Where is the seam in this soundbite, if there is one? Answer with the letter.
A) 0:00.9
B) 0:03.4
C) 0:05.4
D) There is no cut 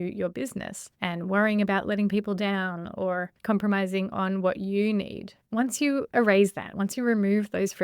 C